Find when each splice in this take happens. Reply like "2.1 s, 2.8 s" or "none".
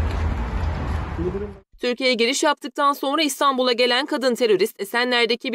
1.3 s